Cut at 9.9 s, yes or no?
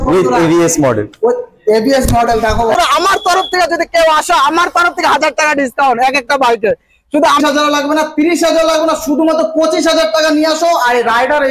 no